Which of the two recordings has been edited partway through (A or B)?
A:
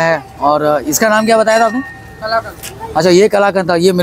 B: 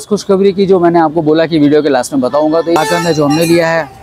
B